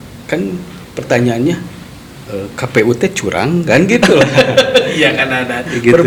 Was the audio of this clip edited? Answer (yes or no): no